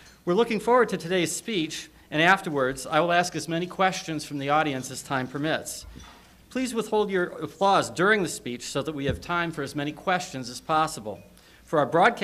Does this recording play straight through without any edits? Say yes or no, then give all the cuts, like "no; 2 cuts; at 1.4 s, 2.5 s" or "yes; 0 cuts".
yes; 0 cuts